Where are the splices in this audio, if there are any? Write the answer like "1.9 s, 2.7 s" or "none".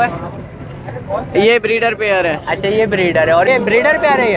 3.5 s